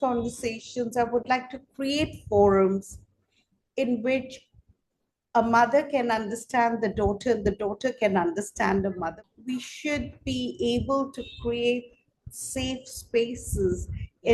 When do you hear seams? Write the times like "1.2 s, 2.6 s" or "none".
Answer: 9.0 s